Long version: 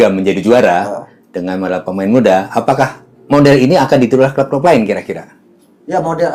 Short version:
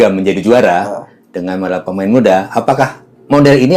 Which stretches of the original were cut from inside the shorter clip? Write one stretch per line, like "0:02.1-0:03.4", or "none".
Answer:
none